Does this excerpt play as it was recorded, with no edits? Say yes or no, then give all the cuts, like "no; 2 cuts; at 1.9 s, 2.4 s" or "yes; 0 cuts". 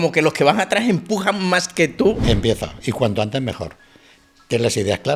no; 1 cut; at 2.2 s